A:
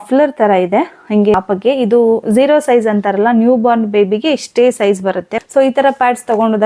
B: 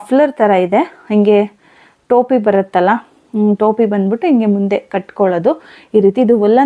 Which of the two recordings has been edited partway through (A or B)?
A